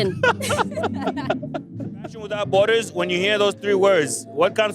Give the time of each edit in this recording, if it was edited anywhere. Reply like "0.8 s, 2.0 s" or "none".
2.4 s